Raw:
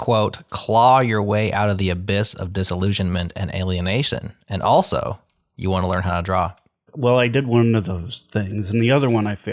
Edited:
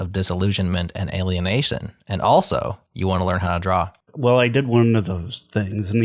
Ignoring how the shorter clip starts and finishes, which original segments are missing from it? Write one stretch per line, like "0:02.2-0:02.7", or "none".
0:05.2-0:05.5
0:06.7-0:06.8